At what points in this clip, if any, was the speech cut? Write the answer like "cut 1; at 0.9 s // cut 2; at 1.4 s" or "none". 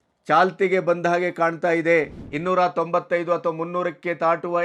cut 1; at 2.2 s